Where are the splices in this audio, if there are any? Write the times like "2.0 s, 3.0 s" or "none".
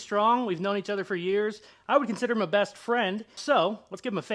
3.4 s